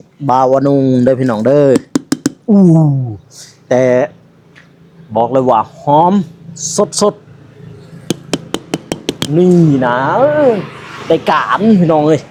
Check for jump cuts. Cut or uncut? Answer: uncut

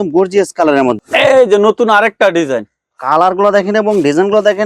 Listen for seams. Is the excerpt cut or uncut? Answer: cut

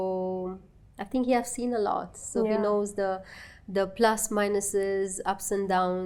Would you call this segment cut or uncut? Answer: uncut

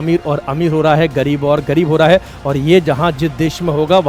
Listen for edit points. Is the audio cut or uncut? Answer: uncut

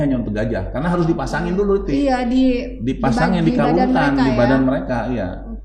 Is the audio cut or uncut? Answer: uncut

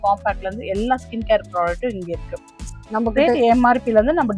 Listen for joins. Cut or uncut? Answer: cut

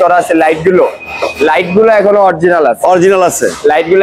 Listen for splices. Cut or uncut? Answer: uncut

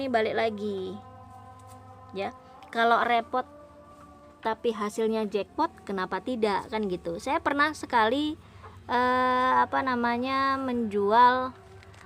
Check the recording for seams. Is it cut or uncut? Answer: uncut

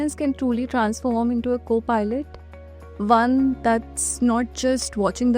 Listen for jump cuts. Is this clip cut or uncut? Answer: uncut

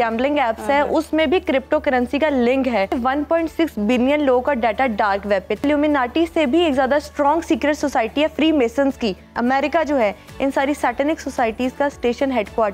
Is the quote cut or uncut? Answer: cut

